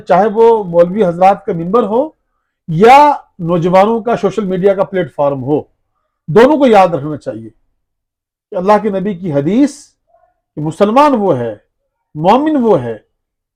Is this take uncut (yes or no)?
yes